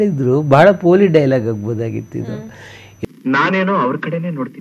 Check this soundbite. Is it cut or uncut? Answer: uncut